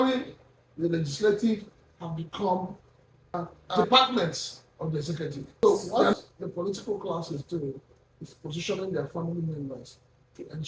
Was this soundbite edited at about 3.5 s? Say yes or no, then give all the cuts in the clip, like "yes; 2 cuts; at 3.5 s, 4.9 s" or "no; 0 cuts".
yes; 2 cuts; at 3.5 s, 5.6 s